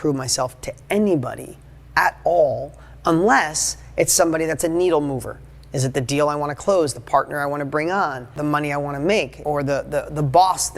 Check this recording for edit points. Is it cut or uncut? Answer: cut